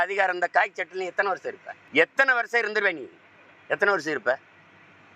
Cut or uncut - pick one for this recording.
cut